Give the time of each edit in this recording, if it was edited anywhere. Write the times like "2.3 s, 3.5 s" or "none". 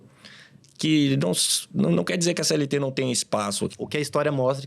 3.7 s